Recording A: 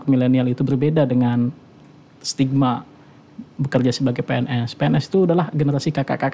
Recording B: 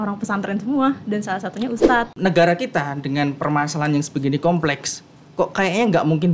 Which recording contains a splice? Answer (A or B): B